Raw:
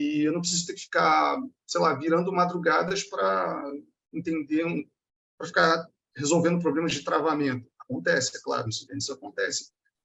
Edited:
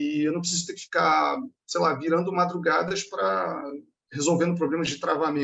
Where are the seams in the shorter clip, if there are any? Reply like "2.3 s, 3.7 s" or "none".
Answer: 4.0 s

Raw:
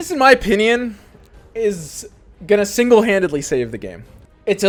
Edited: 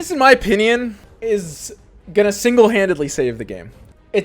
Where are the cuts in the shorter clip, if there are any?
1.1 s

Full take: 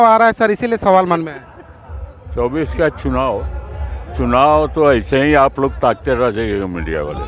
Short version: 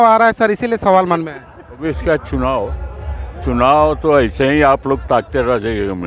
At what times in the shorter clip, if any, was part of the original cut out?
1.8 s

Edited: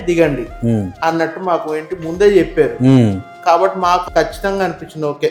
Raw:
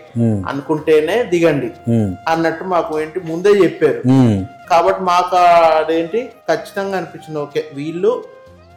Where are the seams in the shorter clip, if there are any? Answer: 4.0 s

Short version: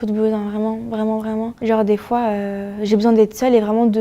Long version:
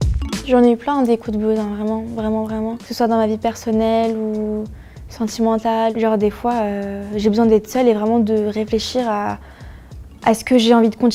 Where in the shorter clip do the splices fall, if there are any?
1.6 s

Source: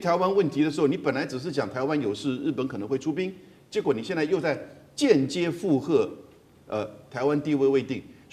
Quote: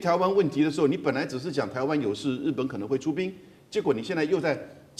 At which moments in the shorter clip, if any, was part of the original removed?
none

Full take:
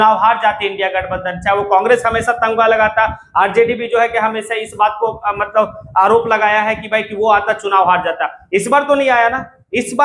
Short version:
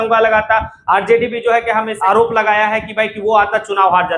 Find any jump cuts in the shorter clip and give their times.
1.9 s

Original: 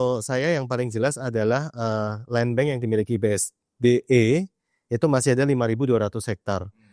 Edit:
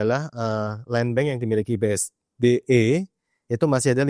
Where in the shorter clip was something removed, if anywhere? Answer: none

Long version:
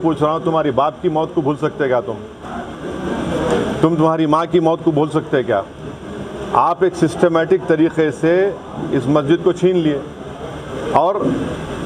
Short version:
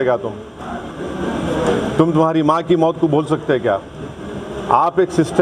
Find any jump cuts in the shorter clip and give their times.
none

